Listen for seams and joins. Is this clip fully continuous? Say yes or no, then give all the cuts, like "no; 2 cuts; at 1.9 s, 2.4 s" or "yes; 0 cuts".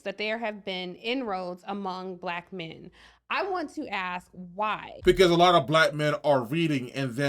no; 1 cut; at 5.1 s